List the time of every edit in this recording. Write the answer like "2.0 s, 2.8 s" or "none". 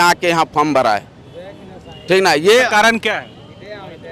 none